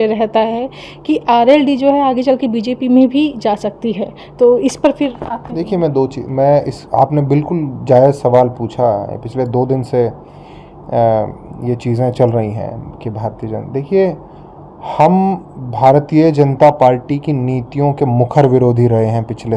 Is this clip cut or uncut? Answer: uncut